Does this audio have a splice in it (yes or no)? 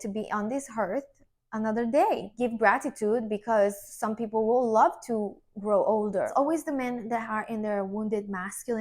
yes